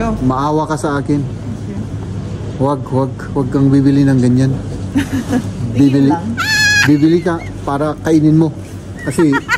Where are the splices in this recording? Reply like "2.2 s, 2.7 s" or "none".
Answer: none